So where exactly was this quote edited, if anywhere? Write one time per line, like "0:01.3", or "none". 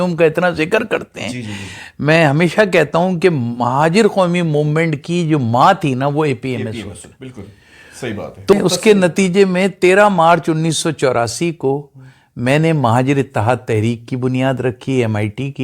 0:08.5